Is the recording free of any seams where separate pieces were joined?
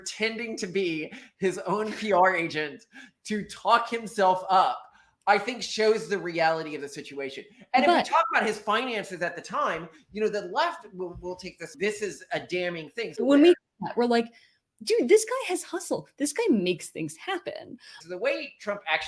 no; 2 cuts; at 13.1 s, 18.0 s

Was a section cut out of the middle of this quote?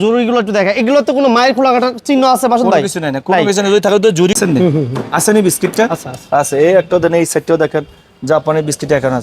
yes; 1 cut; at 4.4 s

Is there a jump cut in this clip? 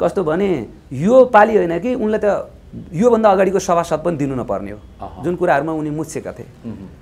no; 0 cuts

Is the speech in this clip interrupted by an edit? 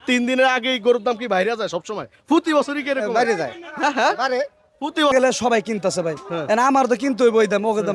yes; 1 cut; at 5.1 s

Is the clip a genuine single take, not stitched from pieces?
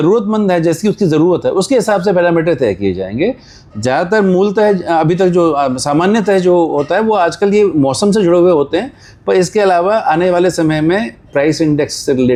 yes; 0 cuts

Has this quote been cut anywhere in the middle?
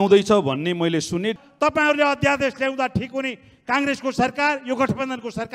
yes; 1 cut; at 1.4 s

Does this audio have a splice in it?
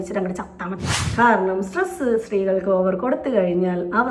yes; 1 cut; at 1.0 s

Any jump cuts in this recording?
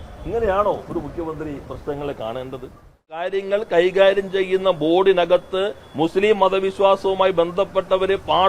yes; 1 cut; at 3.3 s

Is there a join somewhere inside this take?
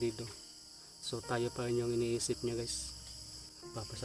yes; 1 cut; at 3.1 s

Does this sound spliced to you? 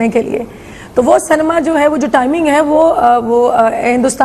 yes; 1 cut; at 2.7 s

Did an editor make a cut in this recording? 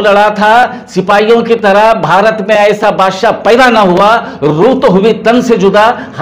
no; 0 cuts

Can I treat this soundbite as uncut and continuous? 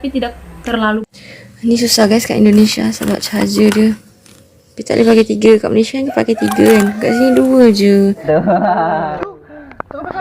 no; 2 cuts; at 1.0 s, 8.2 s

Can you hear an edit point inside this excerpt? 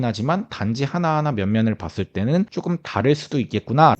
yes; 1 cut; at 2.5 s

